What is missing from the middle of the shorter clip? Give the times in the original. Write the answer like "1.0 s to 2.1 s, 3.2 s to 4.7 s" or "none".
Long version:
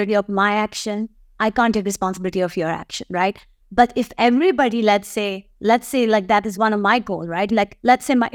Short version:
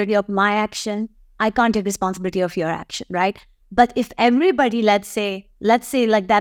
none